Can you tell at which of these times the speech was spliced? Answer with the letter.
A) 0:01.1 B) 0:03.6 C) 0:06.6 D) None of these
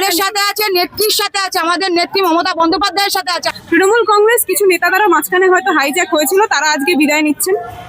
B